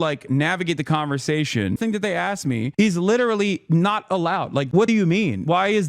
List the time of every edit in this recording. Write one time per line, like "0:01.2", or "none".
0:01.8
0:04.9